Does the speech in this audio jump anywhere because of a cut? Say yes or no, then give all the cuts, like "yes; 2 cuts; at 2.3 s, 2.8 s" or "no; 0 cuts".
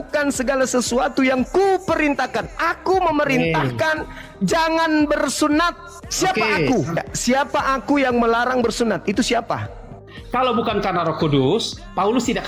yes; 1 cut; at 10.1 s